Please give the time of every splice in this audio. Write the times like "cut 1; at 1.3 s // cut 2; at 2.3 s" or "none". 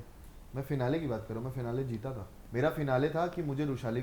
none